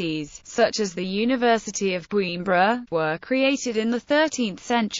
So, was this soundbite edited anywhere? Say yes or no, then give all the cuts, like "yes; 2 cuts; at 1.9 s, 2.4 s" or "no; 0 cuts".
yes; 1 cut; at 3.6 s